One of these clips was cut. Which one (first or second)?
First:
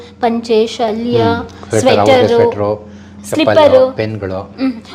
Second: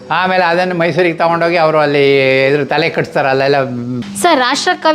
second